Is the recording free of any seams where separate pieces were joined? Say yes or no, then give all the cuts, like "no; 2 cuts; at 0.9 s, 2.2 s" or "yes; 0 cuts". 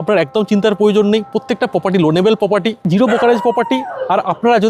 yes; 0 cuts